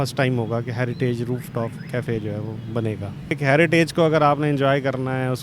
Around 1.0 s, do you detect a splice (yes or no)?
no